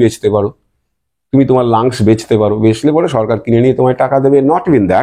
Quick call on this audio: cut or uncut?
uncut